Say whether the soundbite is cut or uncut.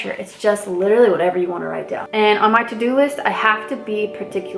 cut